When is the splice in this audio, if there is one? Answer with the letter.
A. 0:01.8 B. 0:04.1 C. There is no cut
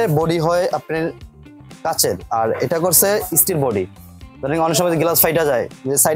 C